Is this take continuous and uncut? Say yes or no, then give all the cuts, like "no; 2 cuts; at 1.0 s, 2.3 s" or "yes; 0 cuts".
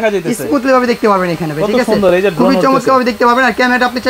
yes; 0 cuts